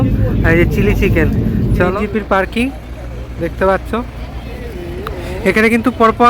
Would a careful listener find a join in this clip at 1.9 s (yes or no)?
yes